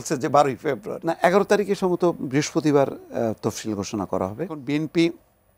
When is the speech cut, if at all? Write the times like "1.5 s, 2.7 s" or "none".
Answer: 0.9 s, 4.6 s